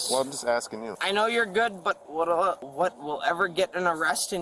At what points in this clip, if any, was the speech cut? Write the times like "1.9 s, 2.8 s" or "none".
1.0 s, 2.6 s